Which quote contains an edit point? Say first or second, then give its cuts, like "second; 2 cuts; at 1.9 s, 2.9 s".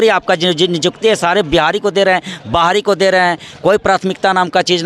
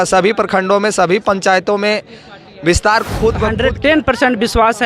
second; 1 cut; at 3.9 s